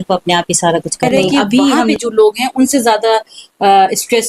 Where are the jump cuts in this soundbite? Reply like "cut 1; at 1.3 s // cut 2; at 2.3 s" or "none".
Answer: cut 1; at 1.9 s